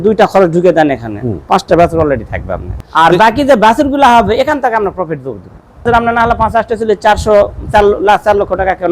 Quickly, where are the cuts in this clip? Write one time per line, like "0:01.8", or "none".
0:02.7
0:05.9

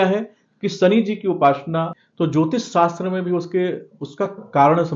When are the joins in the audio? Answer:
0:01.9

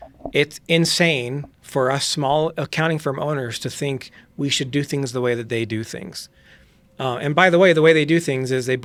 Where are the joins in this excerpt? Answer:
none

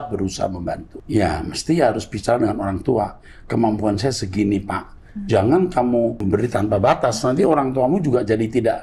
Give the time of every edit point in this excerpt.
0:00.9
0:06.2

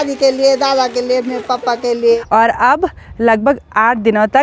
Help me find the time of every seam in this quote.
0:02.2

